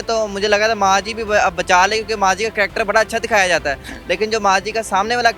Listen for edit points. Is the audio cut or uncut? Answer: uncut